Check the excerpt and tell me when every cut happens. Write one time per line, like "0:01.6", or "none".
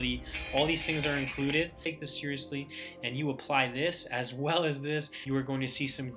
0:01.8
0:05.1